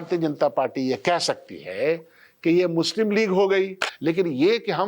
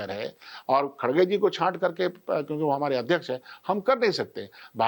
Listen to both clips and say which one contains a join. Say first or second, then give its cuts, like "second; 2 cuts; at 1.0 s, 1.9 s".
first; 1 cut; at 3.8 s